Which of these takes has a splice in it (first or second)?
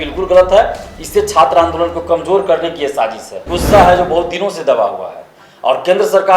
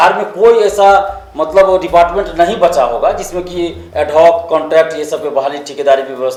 first